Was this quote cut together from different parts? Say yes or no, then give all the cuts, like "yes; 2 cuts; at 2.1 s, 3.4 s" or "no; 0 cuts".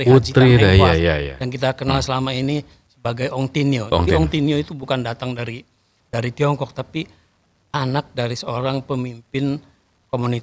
no; 0 cuts